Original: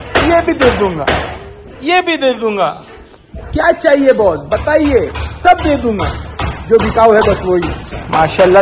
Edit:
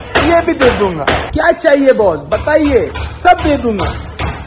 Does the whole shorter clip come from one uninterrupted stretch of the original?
no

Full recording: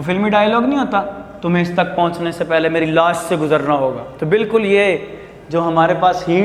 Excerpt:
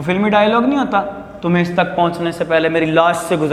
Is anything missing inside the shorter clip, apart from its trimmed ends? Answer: no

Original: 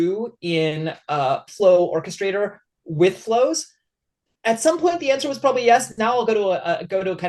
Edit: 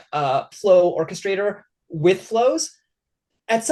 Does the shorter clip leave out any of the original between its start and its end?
no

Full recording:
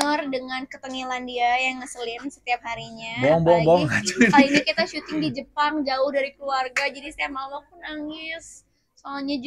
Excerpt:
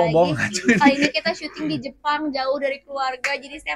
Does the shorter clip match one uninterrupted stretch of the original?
yes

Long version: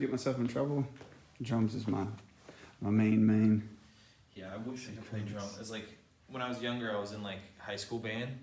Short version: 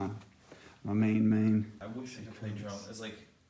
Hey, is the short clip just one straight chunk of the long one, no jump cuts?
no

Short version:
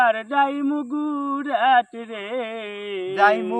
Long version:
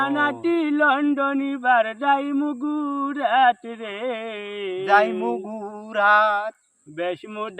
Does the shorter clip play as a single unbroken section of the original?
yes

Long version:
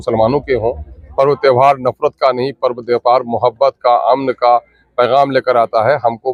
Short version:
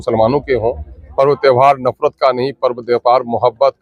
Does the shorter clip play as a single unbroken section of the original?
yes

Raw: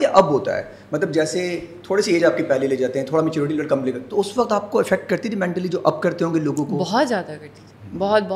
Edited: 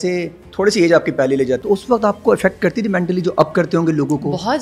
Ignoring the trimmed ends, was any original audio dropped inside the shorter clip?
yes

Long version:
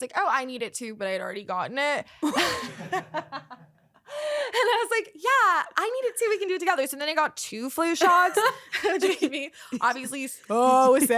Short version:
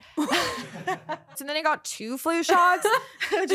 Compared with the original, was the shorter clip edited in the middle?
yes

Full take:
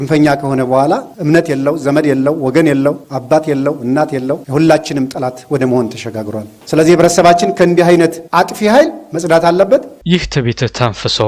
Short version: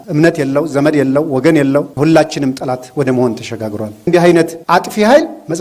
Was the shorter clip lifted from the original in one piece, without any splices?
no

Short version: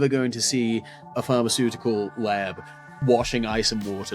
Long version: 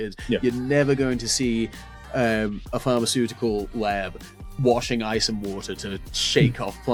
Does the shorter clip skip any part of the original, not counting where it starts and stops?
yes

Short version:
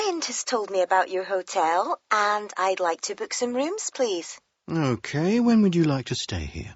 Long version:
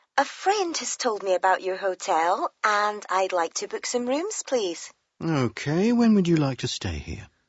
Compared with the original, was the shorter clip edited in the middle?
no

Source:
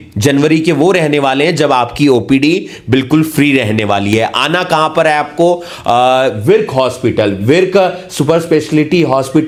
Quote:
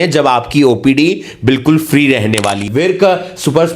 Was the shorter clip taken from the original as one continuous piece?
no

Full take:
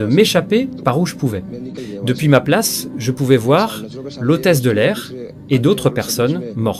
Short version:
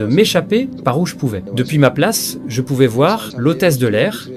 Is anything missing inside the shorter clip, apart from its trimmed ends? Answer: yes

